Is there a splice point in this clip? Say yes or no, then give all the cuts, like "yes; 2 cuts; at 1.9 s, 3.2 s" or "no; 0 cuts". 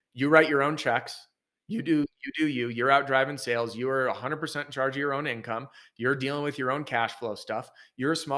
no; 0 cuts